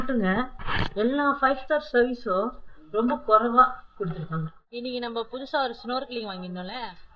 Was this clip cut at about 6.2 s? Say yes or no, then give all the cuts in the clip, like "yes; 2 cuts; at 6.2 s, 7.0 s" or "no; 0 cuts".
no; 1 cut; at 4.6 s